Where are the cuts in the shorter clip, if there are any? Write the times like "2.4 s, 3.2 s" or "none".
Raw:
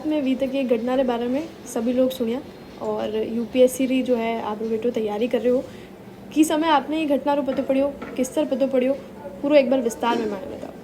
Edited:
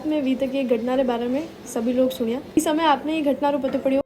2.6 s